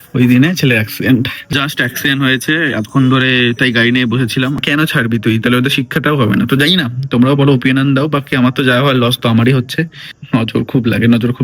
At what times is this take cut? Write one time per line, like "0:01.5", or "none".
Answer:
0:01.5
0:04.6
0:10.1